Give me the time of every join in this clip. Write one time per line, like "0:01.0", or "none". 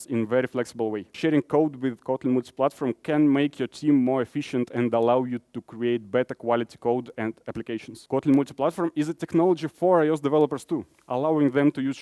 0:01.2
0:07.9